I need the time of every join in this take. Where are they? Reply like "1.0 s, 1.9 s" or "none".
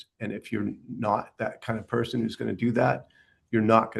none